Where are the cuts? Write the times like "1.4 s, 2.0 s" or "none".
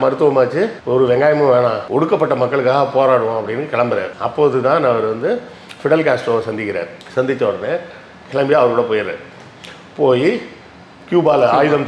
none